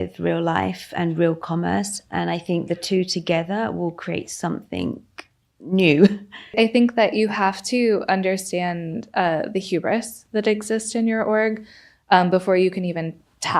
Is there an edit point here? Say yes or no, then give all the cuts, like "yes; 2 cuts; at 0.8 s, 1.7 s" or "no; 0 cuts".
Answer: yes; 1 cut; at 6.5 s